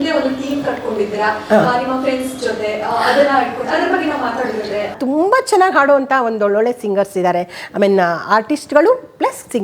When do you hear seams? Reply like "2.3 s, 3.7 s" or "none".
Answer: 5.0 s